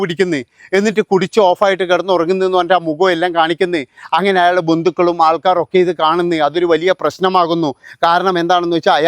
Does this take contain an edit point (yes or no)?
no